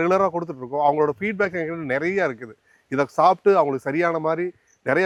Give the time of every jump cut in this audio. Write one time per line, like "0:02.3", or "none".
none